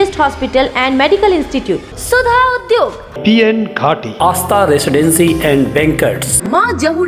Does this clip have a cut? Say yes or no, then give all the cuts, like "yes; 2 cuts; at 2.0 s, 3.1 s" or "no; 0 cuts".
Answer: no; 0 cuts